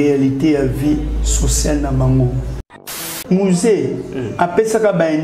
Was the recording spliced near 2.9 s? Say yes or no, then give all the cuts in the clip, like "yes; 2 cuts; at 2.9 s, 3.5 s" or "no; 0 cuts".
yes; 1 cut; at 2.9 s